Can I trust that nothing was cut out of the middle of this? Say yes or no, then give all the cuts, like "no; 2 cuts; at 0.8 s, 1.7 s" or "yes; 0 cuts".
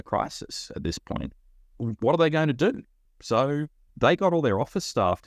yes; 0 cuts